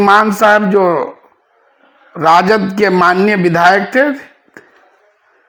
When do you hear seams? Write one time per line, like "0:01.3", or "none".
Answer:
none